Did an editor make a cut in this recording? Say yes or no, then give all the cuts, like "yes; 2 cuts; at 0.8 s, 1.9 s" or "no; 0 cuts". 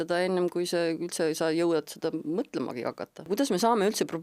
yes; 1 cut; at 3.3 s